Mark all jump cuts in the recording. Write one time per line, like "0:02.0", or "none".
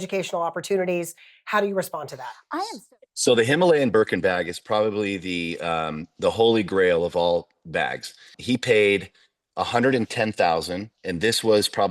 0:02.6
0:08.4